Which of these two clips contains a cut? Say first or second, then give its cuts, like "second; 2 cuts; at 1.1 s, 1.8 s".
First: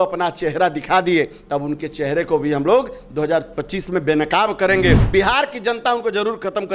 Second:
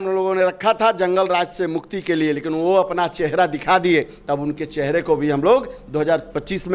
first; 1 cut; at 5.0 s